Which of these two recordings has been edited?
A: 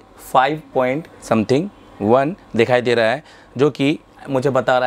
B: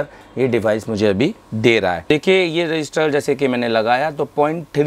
B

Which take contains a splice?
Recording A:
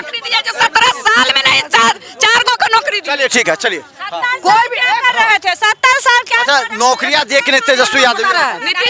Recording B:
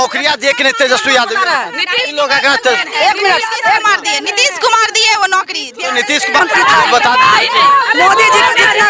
B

